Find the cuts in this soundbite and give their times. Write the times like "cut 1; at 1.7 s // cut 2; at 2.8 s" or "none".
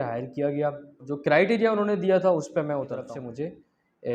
cut 1; at 1.1 s // cut 2; at 3.1 s